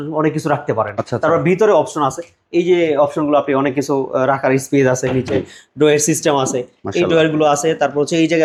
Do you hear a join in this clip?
no; 0 cuts

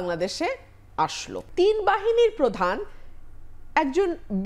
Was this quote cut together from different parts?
yes; 1 cut; at 1.5 s

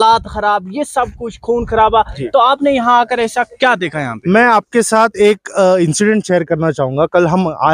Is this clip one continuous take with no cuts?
no; 1 cut; at 2.2 s

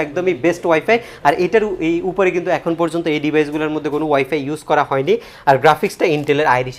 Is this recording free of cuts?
yes; 0 cuts

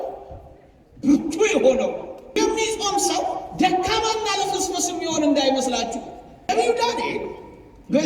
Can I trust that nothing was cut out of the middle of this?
no; 2 cuts; at 2.4 s, 6.5 s

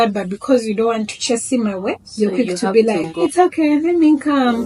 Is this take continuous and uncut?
no; 2 cuts; at 2.1 s, 3.1 s

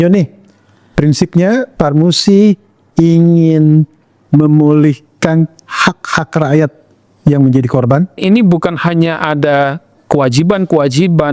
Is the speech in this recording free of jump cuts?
no; 1 cut; at 8.2 s

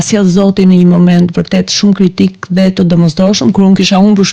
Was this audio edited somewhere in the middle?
no; 0 cuts

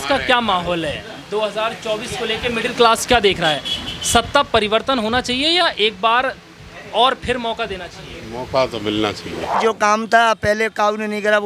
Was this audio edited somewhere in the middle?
yes; 1 cut; at 9.6 s

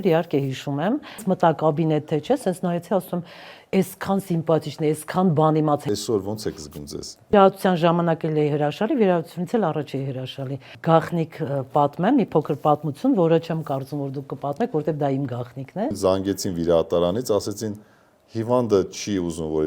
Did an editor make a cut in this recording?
yes; 5 cuts; at 1.3 s, 5.8 s, 7.3 s, 10.7 s, 16.0 s

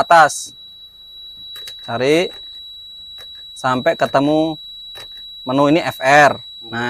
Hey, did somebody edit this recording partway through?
no; 0 cuts

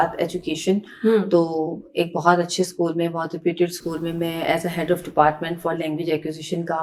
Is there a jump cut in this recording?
no; 0 cuts

